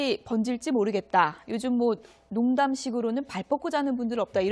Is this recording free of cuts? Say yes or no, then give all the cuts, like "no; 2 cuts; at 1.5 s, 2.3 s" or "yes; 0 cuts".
yes; 0 cuts